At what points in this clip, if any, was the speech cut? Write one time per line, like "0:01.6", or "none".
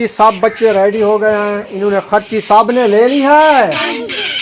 none